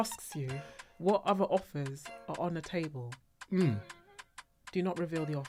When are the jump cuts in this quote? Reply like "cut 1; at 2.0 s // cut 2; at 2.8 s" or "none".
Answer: none

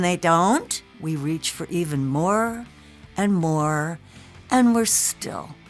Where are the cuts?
none

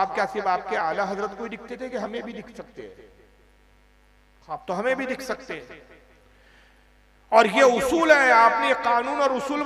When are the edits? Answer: none

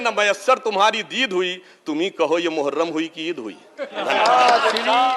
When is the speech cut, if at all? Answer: none

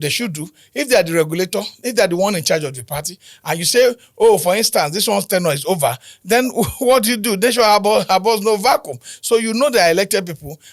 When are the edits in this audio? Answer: none

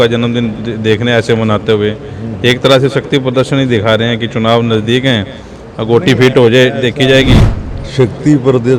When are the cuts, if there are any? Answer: cut 1; at 7.4 s

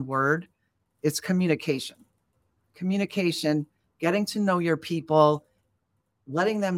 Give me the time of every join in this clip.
cut 1; at 0.9 s

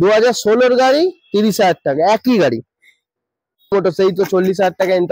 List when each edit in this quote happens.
cut 1; at 3.7 s

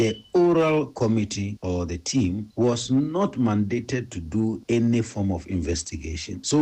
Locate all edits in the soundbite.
none

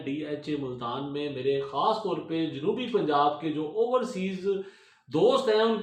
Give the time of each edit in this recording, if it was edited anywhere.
none

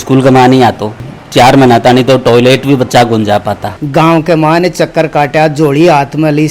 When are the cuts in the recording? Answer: cut 1; at 1.0 s // cut 2; at 3.6 s

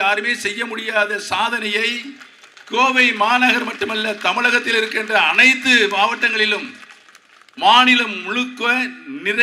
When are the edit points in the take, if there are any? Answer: none

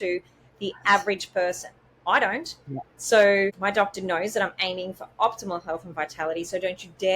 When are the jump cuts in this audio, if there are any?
cut 1; at 3.6 s

